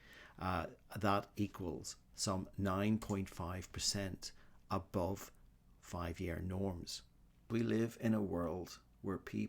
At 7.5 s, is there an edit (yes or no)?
yes